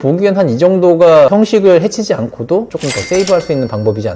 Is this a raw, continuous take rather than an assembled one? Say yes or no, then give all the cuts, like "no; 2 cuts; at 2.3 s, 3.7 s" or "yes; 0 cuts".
no; 2 cuts; at 1.3 s, 2.8 s